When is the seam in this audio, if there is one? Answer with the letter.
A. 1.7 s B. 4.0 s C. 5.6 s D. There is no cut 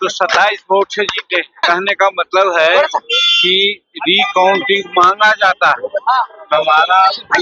A